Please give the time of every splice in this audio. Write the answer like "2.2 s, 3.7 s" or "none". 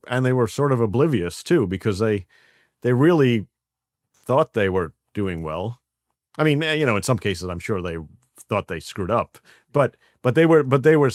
none